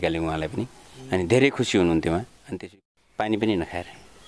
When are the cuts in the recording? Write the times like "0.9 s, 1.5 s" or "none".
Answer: 2.4 s

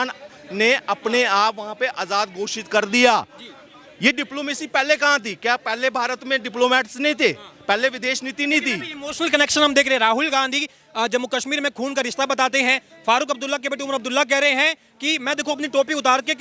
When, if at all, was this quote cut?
none

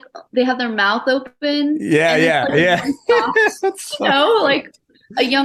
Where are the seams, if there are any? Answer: none

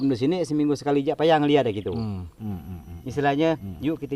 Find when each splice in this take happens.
2.4 s

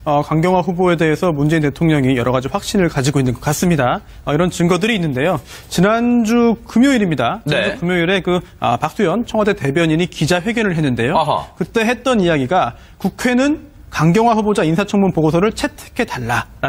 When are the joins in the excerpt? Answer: none

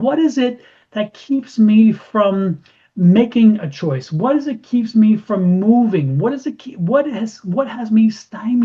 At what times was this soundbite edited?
none

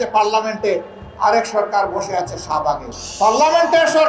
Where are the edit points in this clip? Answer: 3.0 s

